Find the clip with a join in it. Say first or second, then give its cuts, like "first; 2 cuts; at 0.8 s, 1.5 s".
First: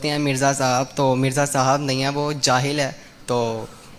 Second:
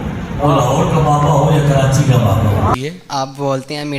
second; 1 cut; at 2.7 s